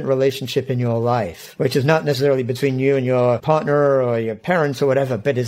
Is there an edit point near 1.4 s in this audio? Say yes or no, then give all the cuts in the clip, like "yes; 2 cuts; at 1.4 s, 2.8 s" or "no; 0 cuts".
yes; 1 cut; at 1.4 s